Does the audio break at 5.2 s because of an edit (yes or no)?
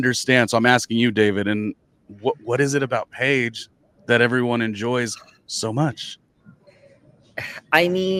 no